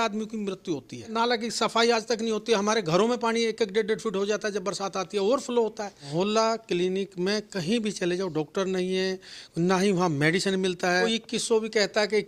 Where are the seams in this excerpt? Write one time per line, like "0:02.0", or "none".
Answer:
0:01.1
0:06.0
0:11.1